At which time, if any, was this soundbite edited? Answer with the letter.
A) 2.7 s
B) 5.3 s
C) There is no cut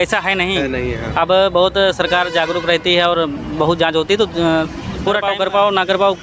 B